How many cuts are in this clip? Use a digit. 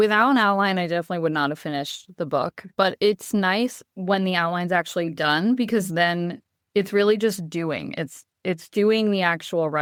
0